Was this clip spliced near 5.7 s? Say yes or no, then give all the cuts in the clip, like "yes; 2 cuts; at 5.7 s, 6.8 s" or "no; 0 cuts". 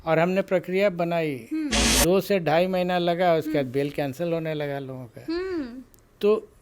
no; 1 cut; at 1.8 s